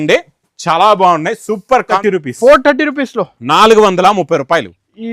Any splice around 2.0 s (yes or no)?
yes